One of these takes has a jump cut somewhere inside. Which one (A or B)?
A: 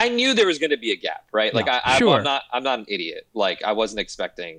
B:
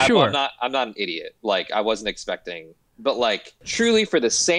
B